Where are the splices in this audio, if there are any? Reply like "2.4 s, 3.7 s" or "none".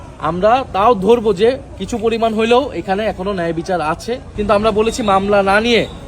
4.3 s